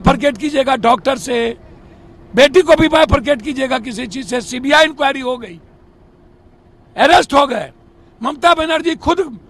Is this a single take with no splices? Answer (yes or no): yes